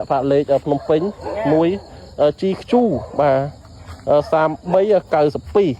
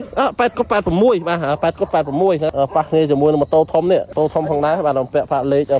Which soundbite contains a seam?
second; 2 cuts; at 2.5 s, 4.1 s

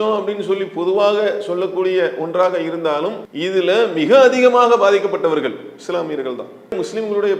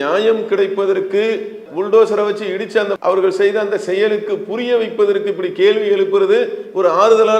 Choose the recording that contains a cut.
first; 1 cut; at 3.3 s

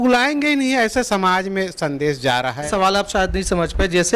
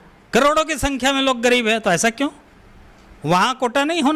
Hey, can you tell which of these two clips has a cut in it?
first; 1 cut; at 2.6 s

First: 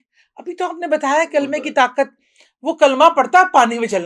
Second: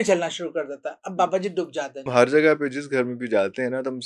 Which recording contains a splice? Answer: second; 1 cut; at 2.1 s

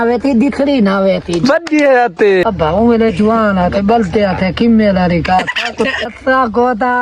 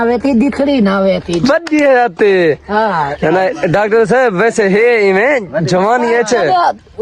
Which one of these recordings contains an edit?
first; 2 cuts; at 2.4 s, 6.1 s

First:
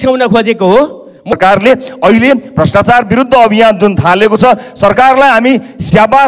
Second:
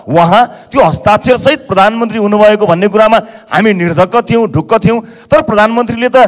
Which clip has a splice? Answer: first; 1 cut; at 1.3 s

